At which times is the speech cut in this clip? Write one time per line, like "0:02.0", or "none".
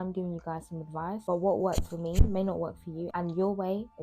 0:03.1